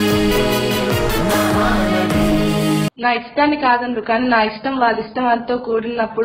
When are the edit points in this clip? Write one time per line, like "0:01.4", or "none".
0:02.9